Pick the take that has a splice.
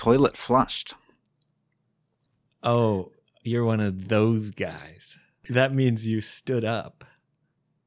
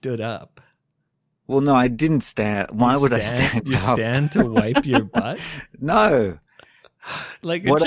first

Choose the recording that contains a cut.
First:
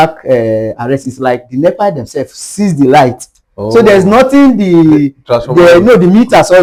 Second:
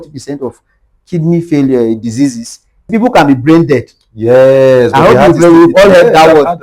second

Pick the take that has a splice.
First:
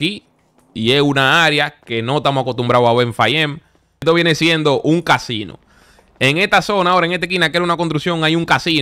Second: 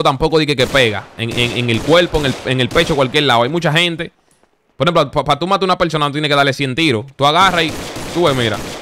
first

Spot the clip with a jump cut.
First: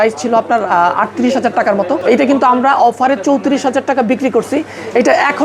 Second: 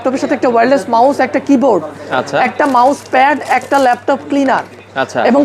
first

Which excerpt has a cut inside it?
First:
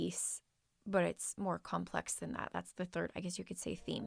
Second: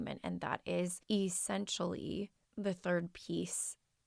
second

